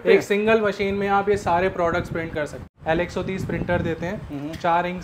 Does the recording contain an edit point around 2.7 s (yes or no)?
yes